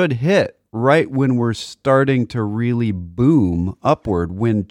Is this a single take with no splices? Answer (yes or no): yes